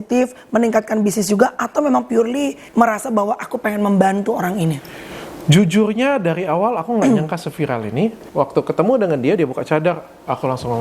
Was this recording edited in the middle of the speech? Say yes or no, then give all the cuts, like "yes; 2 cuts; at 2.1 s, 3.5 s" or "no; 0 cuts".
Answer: yes; 2 cuts; at 2.6 s, 8.2 s